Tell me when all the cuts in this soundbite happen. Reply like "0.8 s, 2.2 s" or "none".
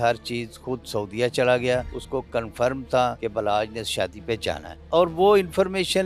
2.0 s, 3.2 s, 4.7 s